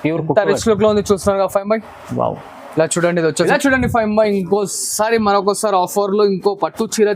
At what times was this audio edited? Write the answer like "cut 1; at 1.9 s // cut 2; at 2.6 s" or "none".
cut 1; at 3.5 s